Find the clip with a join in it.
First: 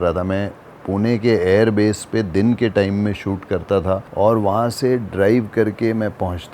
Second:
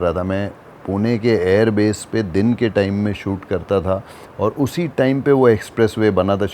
first; 1 cut; at 4.1 s

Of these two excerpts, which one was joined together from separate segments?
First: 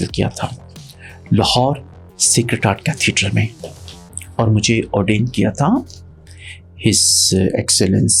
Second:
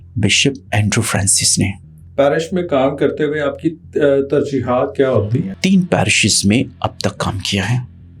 second; 2 cuts; at 2.0 s, 5.5 s

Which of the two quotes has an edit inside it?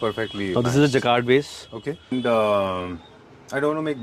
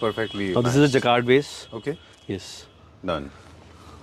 first; 1 cut; at 2.1 s

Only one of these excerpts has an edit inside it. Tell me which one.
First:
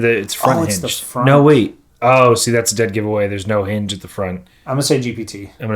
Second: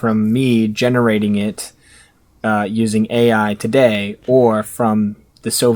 first; 2 cuts; at 1.8 s, 4.5 s

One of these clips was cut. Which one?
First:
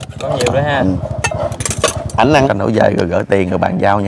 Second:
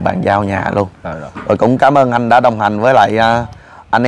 first; 1 cut; at 2.5 s

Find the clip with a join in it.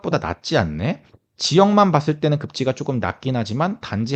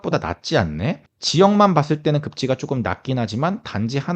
second; 1 cut; at 1.1 s

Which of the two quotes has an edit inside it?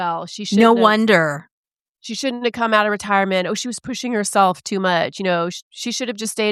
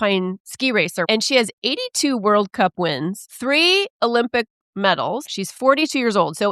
second; 3 cuts; at 1.1 s, 3.3 s, 5.3 s

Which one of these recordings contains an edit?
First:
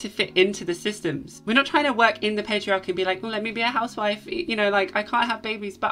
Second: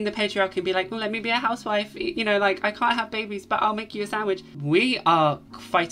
second; 1 cut; at 4.5 s

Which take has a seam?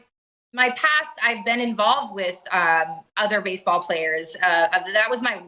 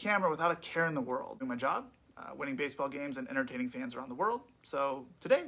second; 1 cut; at 1.3 s

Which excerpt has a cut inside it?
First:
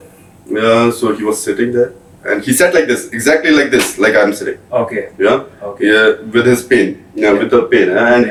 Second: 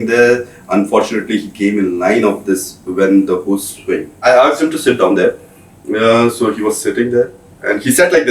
second; 1 cut; at 4.2 s

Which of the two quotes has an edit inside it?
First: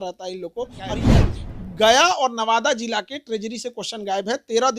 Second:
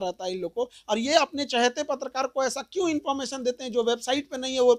first; 1 cut; at 1.0 s

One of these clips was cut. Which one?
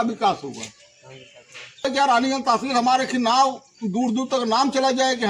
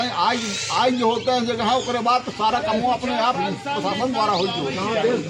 first; 1 cut; at 1.8 s

